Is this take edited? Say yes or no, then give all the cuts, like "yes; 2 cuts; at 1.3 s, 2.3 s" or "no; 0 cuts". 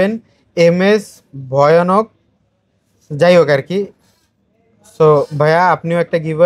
no; 0 cuts